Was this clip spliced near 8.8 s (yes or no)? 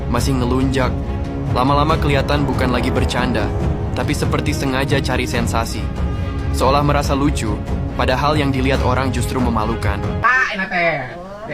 no